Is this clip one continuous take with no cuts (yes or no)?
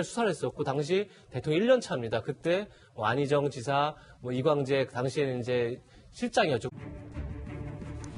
yes